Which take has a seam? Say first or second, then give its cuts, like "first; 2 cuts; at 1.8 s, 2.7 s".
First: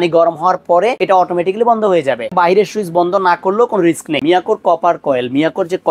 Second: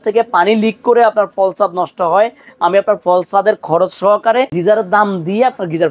first; 3 cuts; at 1.0 s, 2.3 s, 4.2 s